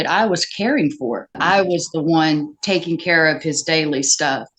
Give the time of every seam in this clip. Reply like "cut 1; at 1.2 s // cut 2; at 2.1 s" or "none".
cut 1; at 1.4 s